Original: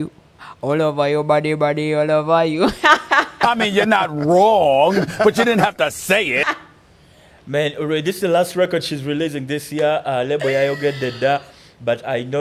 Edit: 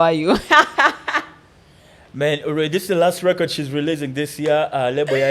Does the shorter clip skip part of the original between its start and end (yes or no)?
yes